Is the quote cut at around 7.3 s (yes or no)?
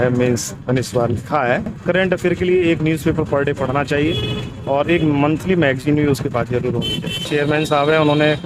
yes